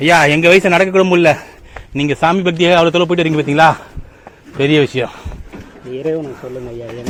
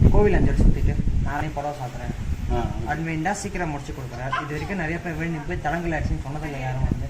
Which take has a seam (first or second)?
second